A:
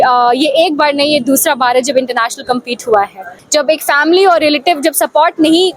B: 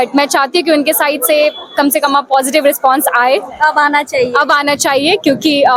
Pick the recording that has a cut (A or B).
A